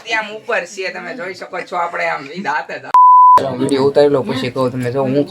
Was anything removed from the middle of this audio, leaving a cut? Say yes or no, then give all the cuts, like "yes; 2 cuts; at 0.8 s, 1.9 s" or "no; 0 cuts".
yes; 2 cuts; at 2.8 s, 3.5 s